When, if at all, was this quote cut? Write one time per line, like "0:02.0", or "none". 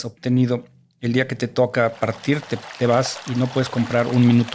none